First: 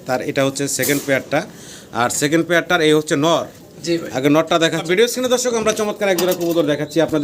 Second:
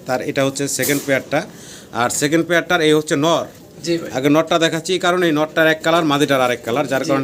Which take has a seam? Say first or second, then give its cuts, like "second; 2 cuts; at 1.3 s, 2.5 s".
first; 1 cut; at 4.8 s